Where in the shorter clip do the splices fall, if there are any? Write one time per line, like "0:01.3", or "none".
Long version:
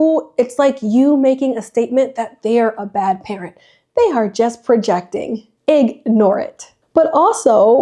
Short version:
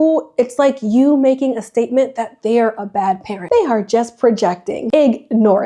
0:03.3
0:04.8

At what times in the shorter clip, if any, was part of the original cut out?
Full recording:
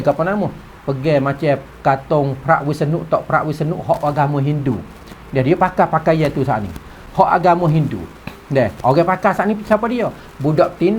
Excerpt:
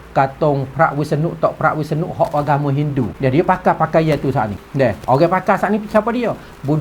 0:03.1
0:04.6

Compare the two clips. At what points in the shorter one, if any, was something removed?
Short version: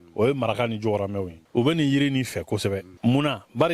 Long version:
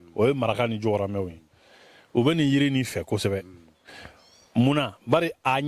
0:01.3
0:02.9

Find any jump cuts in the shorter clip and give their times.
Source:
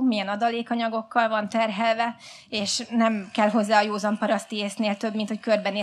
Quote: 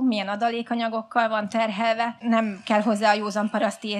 0:02.2

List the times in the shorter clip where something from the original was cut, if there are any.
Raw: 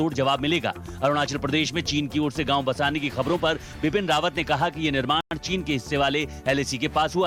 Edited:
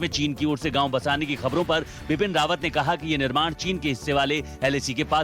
0:03.5

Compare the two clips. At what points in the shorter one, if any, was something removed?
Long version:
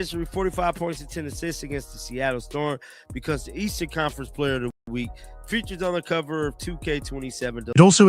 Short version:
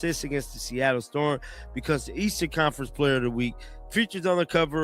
0:03.3

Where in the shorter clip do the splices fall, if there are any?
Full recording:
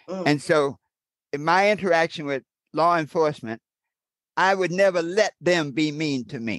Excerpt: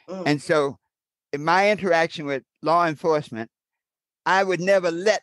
0:02.5

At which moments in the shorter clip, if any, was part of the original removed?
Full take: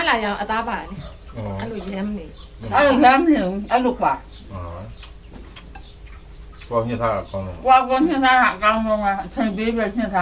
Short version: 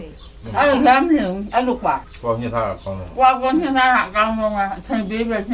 0:02.1

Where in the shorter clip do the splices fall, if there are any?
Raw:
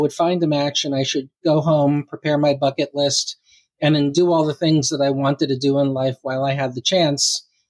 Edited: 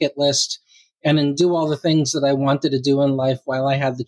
none

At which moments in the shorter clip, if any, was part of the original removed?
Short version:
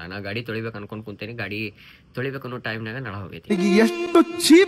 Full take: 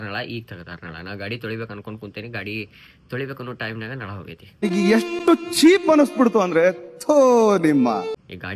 0:03.3

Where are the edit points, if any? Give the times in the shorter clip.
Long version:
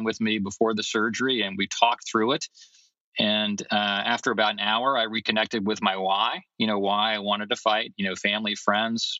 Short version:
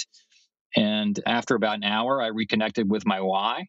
0:01.2

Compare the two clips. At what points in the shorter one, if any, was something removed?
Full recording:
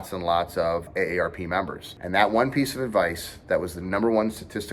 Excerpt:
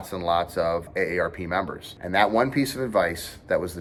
none

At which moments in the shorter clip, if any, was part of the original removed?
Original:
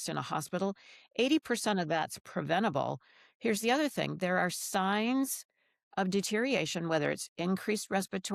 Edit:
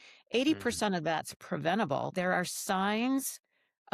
0:02.1

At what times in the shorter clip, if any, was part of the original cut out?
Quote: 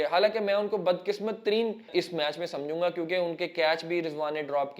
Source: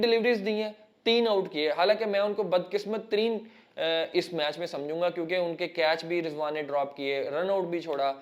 0:01.9

